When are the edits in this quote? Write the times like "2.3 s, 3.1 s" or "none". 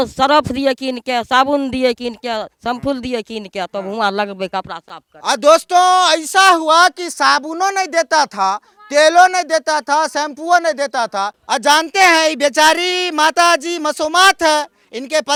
none